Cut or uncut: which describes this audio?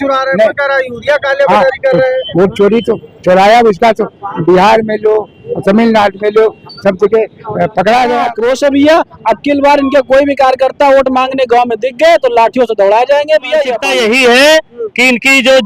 cut